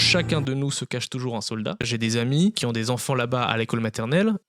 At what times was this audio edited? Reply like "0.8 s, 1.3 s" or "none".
1.9 s